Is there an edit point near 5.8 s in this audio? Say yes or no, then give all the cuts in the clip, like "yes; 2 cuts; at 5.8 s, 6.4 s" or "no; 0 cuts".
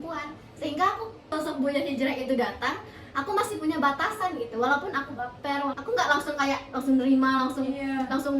yes; 2 cuts; at 1.3 s, 5.8 s